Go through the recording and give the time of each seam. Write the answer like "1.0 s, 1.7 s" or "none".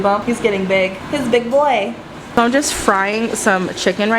1.0 s, 2.2 s